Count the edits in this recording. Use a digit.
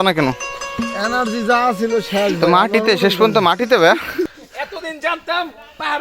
1